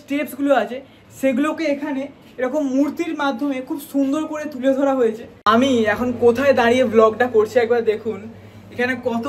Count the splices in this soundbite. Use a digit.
1